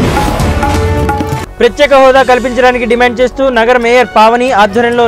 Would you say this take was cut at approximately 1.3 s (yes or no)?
yes